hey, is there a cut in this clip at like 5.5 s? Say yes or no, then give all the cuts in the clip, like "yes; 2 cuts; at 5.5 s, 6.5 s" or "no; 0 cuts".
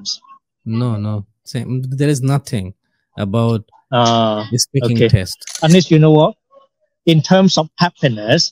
yes; 2 cuts; at 1.4 s, 5.5 s